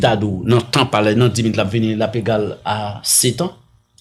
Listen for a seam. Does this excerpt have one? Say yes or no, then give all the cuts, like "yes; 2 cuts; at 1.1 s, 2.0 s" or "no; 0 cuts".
no; 0 cuts